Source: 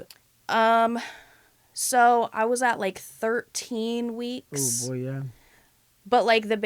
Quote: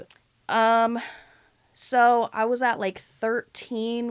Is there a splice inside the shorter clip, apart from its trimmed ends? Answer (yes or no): no